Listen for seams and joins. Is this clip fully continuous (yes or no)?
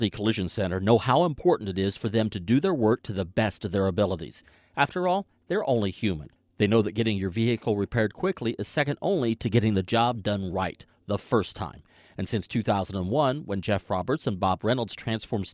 yes